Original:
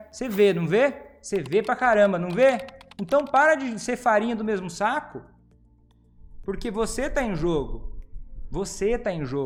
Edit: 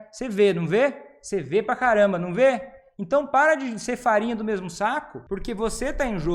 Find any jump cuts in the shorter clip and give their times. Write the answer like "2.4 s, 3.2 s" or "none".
5.1 s